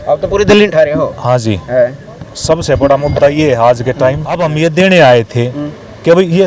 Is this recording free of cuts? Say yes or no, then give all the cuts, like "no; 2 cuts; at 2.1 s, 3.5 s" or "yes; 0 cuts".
no; 1 cut; at 4.4 s